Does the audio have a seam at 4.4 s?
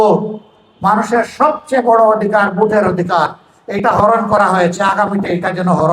no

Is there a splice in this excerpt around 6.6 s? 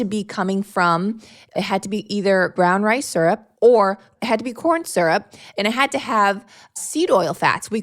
no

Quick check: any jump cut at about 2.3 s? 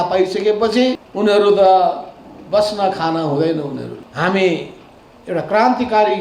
no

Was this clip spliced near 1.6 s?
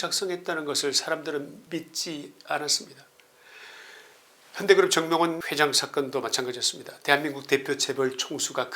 yes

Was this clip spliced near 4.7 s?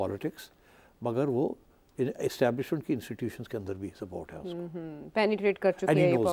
no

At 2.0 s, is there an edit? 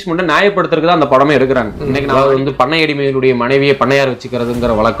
yes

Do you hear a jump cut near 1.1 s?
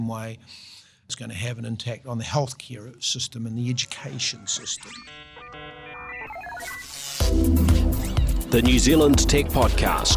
yes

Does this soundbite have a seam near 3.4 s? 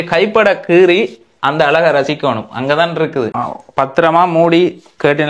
yes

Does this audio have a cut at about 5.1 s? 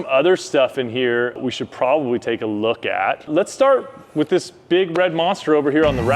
no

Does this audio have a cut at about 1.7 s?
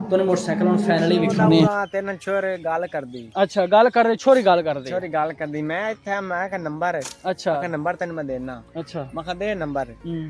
yes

